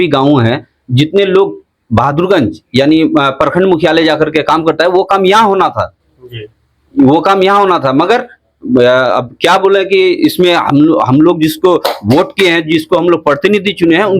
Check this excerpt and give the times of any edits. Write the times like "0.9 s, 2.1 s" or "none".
none